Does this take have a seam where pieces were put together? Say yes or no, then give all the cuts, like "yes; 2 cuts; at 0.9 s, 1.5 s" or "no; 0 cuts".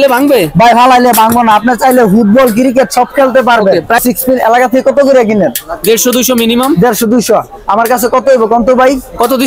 yes; 1 cut; at 3.9 s